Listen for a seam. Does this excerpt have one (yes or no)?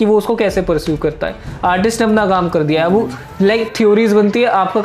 no